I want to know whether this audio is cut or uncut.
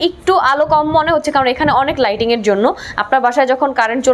uncut